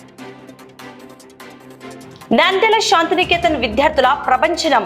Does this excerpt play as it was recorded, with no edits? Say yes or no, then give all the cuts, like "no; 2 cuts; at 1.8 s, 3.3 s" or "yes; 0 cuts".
no; 2 cuts; at 1.4 s, 2.0 s